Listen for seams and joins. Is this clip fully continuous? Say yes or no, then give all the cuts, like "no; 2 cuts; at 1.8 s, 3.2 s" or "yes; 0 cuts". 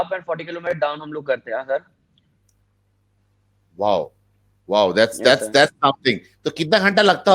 yes; 0 cuts